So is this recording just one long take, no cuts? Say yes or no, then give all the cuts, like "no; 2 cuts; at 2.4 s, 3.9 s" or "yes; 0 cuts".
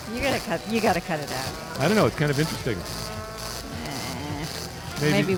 yes; 0 cuts